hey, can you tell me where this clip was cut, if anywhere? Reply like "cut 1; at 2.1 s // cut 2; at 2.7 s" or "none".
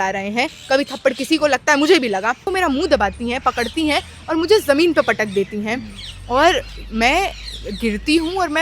cut 1; at 2.5 s